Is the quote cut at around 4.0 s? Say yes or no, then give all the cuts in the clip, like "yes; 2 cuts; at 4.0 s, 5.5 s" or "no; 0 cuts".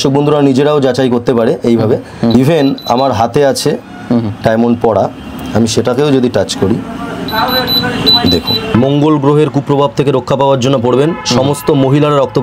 no; 2 cuts; at 2.3 s, 8.7 s